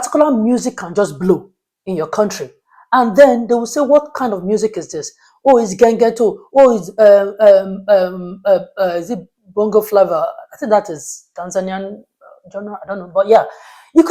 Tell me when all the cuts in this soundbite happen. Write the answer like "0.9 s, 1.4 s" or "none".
none